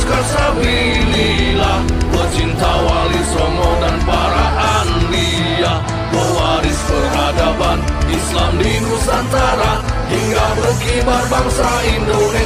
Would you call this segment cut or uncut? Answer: uncut